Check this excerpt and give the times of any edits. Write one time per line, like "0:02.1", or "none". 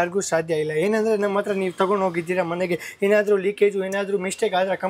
none